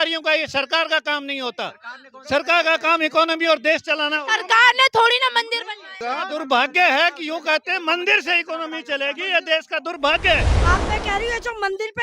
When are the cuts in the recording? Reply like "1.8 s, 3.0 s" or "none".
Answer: 6.0 s, 10.5 s

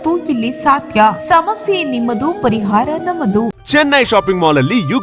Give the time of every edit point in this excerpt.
3.5 s

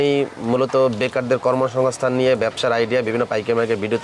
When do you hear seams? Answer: none

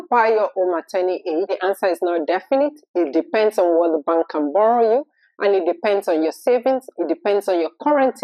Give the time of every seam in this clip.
1.5 s

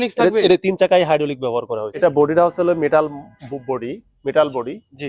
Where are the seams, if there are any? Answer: 1.8 s

